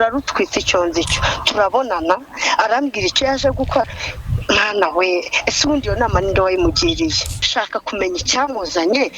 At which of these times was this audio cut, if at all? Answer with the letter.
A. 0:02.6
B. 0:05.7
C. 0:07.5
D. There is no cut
C